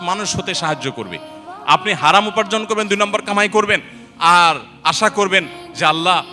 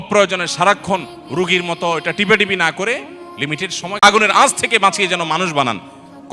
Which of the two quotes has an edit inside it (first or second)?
second